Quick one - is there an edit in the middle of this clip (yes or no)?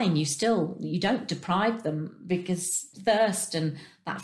yes